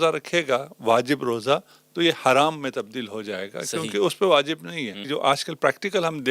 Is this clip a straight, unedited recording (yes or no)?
no